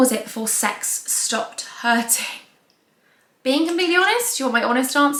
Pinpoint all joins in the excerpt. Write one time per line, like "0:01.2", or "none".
none